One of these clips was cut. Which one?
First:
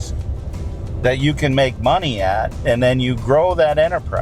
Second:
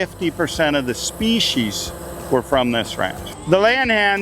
second; 1 cut; at 3.2 s

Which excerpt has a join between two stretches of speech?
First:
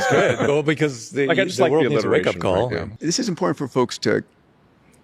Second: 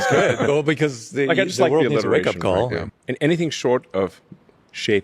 second; 1 cut; at 2.9 s

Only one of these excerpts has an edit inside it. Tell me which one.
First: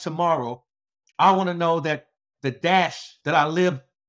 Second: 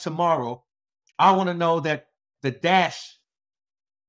first; 1 cut; at 3.1 s

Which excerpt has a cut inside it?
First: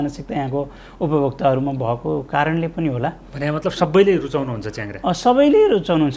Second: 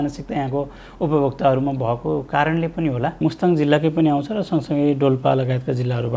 second; 1 cut; at 3.2 s

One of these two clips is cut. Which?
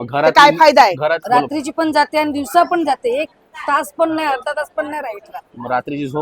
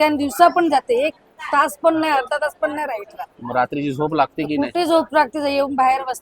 first; 1 cut; at 1.2 s

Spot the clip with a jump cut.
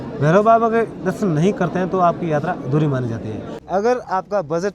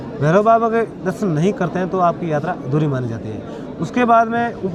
first; 1 cut; at 3.6 s

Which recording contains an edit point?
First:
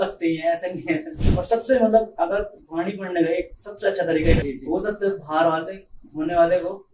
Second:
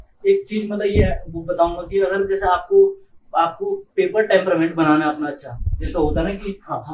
first; 2 cuts; at 1.2 s, 4.4 s

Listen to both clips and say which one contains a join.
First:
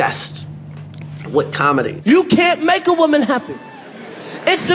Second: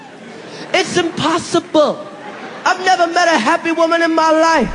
first; 1 cut; at 1.9 s

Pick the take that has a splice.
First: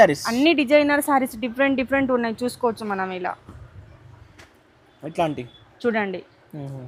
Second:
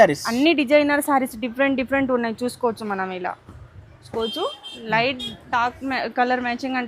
second; 1 cut; at 4.1 s

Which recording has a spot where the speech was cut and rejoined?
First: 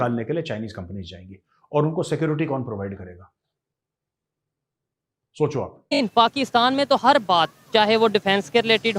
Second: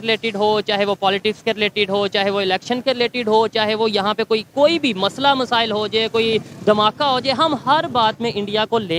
first; 1 cut; at 6.0 s

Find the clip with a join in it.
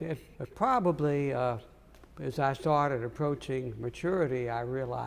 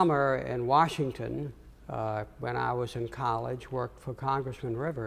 first; 1 cut; at 2.6 s

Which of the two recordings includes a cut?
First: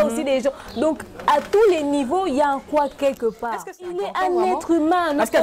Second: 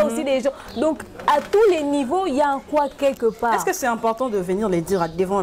first; 1 cut; at 4.0 s

